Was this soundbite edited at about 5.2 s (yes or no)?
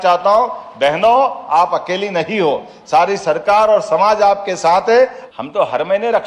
yes